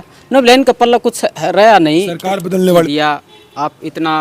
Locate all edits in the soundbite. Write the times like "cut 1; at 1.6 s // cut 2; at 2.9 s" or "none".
cut 1; at 2.8 s